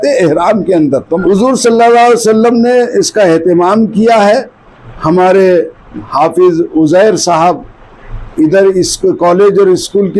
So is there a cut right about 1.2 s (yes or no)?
yes